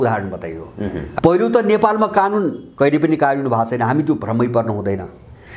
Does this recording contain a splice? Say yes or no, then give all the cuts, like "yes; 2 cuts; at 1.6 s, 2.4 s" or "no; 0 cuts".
yes; 1 cut; at 1.1 s